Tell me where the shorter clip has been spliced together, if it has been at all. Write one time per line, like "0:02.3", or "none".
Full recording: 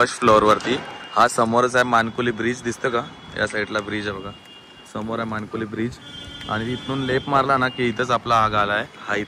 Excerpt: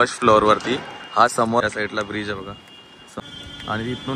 0:01.6
0:03.2